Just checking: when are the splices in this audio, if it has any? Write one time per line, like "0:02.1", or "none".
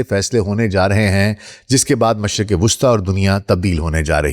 none